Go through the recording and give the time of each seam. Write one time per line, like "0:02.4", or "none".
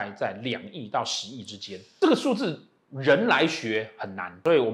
none

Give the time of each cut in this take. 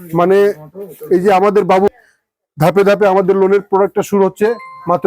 0:01.9

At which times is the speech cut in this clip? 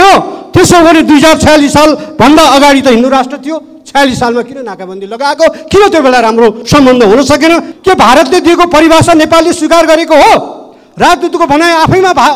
0:07.7
0:10.8

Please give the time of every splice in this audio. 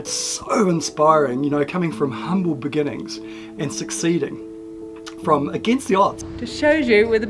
0:06.2

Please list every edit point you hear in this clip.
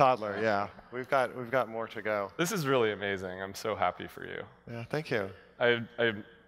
none

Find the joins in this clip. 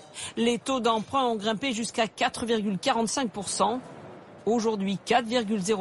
none

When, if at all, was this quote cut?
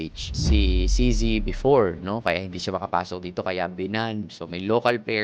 none

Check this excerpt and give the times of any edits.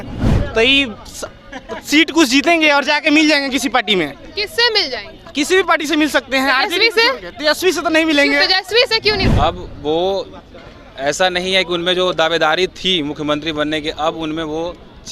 0:09.2

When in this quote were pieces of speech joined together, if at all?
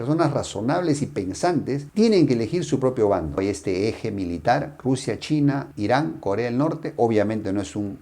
0:03.4

